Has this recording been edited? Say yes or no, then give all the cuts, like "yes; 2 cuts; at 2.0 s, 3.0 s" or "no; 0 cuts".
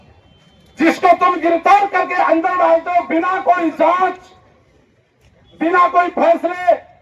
no; 0 cuts